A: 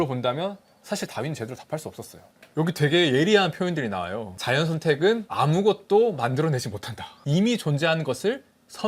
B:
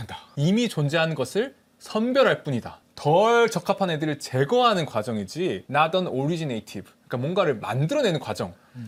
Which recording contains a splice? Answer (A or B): A